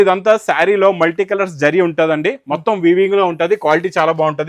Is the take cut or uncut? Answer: uncut